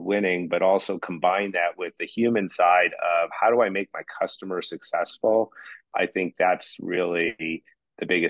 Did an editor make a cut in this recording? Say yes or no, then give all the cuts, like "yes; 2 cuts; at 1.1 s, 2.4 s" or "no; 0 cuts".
yes; 1 cut; at 5.9 s